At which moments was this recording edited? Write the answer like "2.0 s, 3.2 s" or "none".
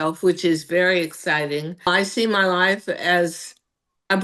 1.9 s